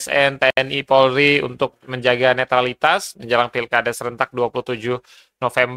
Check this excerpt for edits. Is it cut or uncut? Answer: uncut